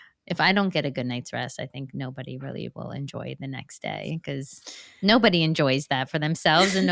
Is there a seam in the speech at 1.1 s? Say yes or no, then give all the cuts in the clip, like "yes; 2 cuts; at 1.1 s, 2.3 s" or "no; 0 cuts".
no; 0 cuts